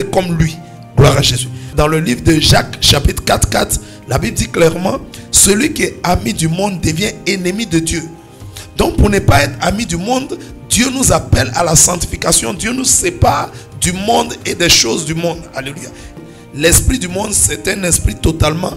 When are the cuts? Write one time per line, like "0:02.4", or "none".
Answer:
0:01.7
0:16.2

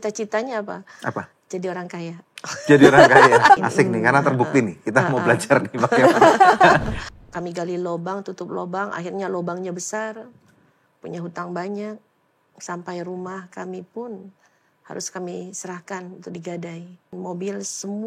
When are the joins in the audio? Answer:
0:03.6
0:07.0
0:17.1

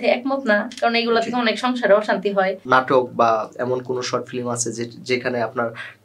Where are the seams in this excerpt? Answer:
0:02.6

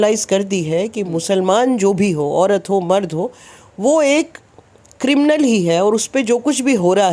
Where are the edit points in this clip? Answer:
none

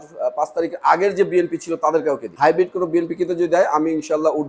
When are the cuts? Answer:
0:02.3

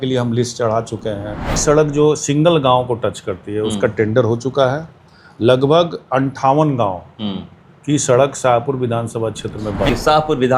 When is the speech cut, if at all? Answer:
0:01.6
0:09.9

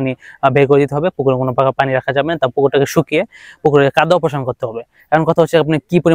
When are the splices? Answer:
none

